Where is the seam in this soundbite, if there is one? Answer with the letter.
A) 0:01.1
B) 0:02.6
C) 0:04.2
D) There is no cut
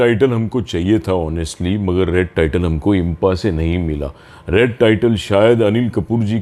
D